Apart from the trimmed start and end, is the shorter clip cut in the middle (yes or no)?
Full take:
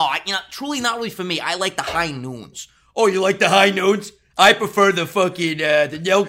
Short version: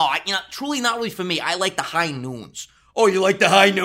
no